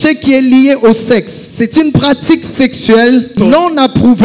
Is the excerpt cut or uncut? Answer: cut